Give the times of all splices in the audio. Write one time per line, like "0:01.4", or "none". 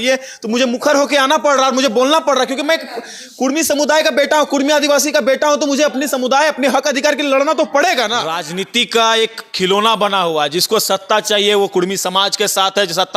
0:08.4